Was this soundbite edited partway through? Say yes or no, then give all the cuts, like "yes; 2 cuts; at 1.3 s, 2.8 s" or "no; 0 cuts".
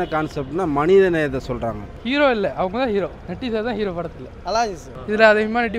yes; 2 cuts; at 1.9 s, 4.9 s